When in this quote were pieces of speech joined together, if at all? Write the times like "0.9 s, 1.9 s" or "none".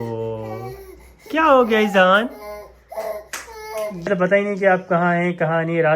4.1 s